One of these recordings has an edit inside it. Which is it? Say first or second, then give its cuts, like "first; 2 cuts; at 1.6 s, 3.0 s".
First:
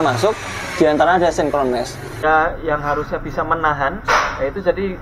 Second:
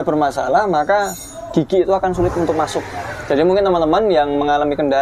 first; 1 cut; at 2.2 s